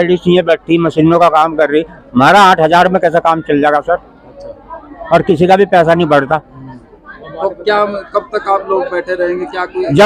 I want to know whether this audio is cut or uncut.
uncut